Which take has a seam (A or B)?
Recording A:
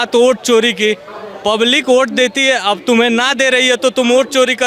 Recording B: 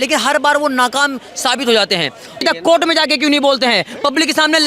B